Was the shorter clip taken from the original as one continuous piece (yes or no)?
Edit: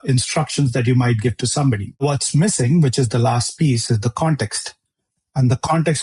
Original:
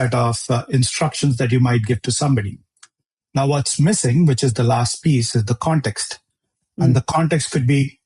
no